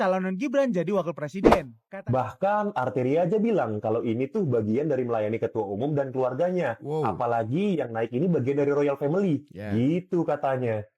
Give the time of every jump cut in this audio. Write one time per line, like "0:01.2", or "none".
0:01.7